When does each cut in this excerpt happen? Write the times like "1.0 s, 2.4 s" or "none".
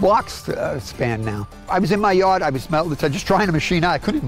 1.7 s